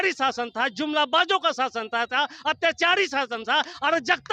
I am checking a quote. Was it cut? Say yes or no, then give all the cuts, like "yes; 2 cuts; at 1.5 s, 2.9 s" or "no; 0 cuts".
no; 0 cuts